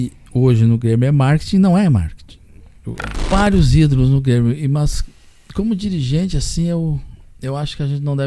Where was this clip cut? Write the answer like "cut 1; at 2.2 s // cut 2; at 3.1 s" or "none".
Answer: cut 1; at 3.3 s